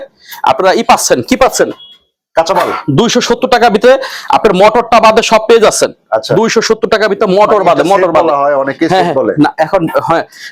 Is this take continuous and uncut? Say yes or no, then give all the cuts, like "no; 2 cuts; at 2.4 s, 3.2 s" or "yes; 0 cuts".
yes; 0 cuts